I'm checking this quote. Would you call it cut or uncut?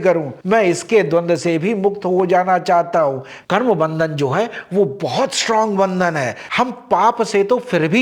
cut